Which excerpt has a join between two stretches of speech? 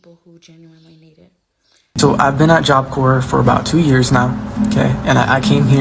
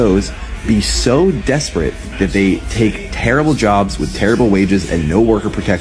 first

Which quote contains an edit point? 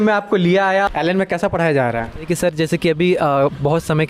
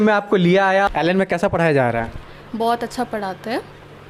first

